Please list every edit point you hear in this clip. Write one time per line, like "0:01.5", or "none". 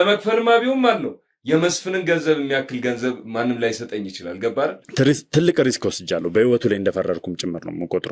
0:04.8